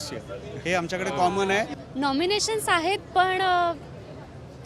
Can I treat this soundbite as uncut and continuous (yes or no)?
no